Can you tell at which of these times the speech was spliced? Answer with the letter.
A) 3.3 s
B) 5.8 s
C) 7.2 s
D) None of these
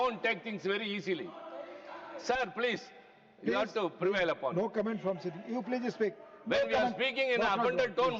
D